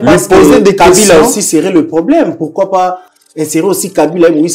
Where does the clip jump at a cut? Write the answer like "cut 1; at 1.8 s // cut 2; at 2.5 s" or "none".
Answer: none